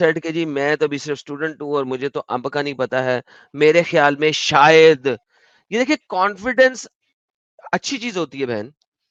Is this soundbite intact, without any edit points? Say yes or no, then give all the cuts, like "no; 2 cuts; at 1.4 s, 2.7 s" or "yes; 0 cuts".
yes; 0 cuts